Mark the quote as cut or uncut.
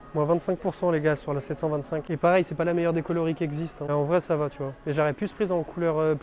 uncut